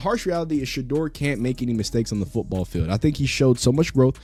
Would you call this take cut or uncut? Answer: uncut